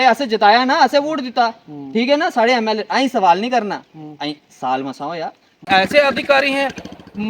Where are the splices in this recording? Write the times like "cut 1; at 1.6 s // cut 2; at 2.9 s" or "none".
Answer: cut 1; at 5.7 s